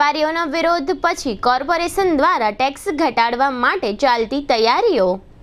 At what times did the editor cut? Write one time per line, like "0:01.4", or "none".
none